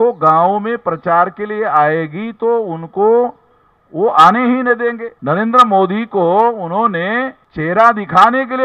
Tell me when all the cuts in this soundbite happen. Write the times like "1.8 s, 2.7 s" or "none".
5.1 s, 7.4 s